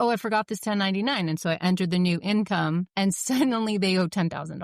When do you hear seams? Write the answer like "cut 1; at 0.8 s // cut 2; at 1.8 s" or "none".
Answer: cut 1; at 2.9 s